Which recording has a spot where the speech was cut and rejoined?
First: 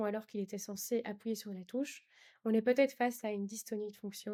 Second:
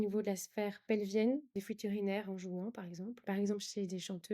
second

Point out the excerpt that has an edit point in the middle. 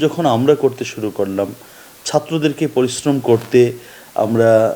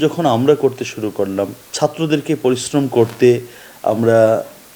second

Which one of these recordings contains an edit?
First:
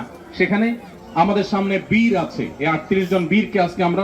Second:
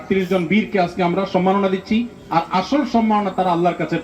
first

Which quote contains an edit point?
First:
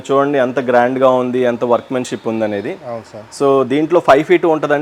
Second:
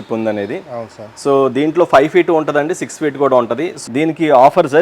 second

